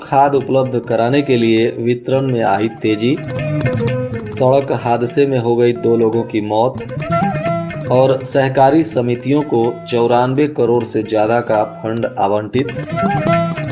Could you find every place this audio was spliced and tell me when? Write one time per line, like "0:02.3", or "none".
none